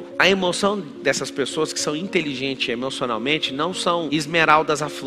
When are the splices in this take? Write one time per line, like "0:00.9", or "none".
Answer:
none